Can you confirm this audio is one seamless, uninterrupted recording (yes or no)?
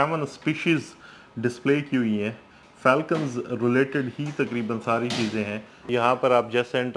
no